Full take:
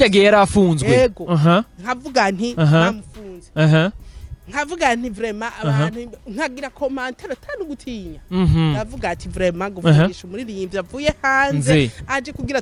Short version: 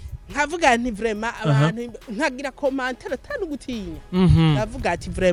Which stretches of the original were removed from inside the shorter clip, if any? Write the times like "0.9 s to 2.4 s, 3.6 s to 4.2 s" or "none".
none